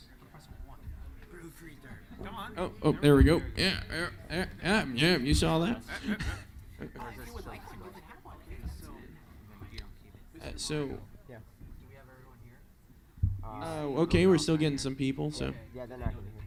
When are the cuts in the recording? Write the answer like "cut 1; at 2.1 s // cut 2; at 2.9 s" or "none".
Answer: none